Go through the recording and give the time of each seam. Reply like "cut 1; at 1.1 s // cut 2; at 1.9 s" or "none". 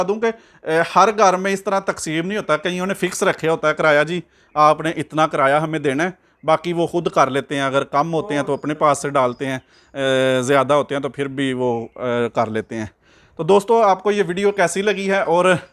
none